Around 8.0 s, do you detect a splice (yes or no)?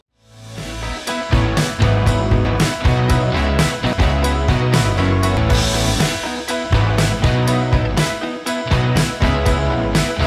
no